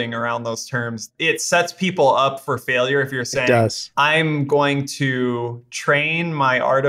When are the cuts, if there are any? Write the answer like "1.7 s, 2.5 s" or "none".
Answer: 1.0 s